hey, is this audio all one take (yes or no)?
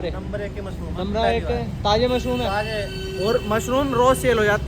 yes